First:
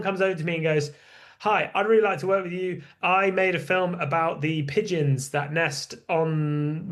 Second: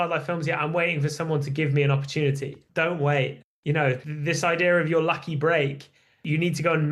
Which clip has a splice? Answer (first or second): second